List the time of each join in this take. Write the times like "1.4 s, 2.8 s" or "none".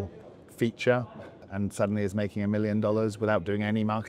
1.4 s